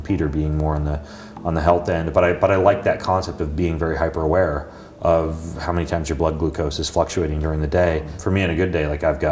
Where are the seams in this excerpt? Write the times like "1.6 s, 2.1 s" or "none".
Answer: 8.1 s